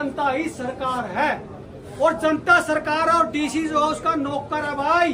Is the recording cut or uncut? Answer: uncut